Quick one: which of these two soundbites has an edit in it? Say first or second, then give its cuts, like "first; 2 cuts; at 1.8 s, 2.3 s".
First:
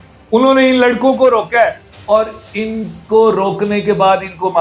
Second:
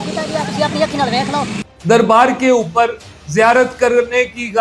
second; 1 cut; at 1.6 s